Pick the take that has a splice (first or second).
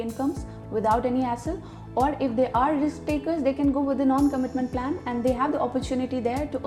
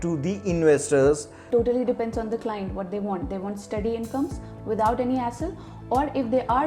second